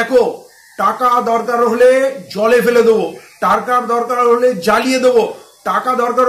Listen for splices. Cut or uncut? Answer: uncut